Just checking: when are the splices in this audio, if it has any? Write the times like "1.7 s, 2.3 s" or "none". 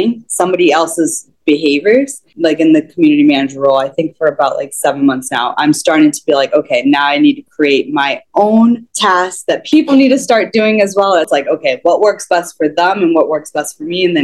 2.2 s, 9.2 s, 11.3 s